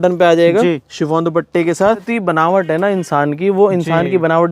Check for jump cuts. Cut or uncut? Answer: cut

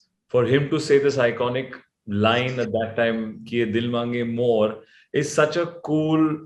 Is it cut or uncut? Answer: uncut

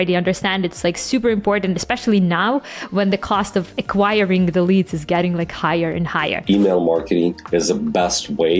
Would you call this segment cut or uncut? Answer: cut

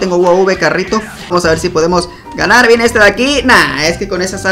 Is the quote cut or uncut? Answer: cut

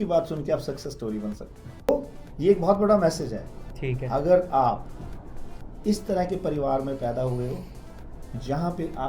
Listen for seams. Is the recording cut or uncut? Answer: cut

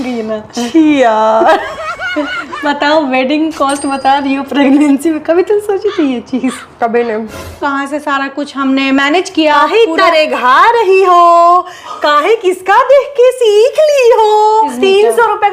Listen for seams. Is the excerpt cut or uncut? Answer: cut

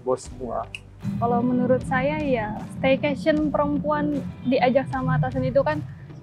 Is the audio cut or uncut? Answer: uncut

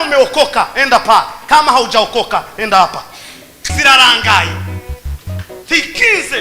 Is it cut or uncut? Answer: cut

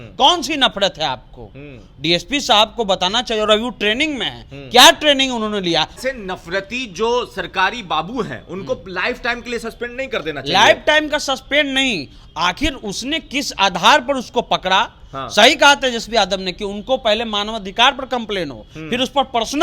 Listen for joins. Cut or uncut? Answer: cut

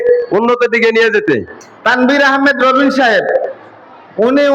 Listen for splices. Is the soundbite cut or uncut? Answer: cut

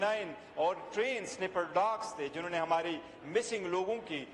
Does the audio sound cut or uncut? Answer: uncut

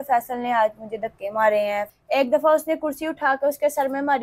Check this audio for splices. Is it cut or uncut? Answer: cut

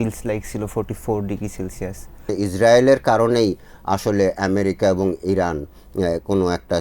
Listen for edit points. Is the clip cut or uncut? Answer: cut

